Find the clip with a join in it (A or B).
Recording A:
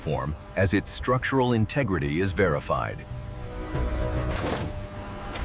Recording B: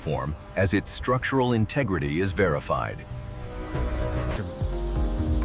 B